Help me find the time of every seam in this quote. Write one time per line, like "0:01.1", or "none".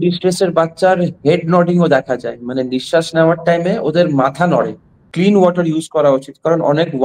0:05.0